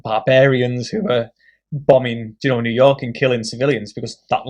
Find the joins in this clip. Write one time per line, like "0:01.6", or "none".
none